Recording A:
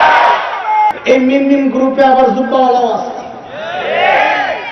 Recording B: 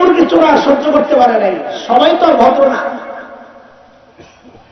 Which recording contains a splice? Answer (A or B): A